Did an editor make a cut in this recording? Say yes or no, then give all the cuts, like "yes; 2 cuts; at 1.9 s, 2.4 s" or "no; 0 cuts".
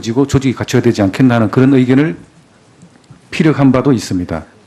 yes; 1 cut; at 1.9 s